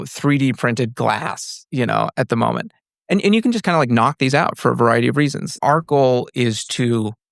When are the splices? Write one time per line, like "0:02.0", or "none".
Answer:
0:05.5